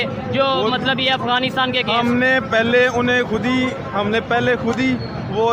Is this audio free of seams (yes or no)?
yes